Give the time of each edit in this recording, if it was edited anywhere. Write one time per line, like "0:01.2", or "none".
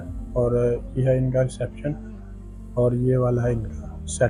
none